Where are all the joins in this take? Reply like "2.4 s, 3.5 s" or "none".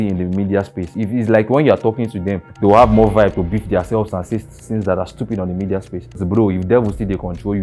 0.9 s, 2.4 s, 6.2 s